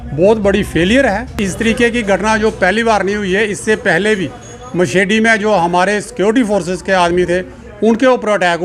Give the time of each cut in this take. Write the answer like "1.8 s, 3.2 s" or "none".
1.4 s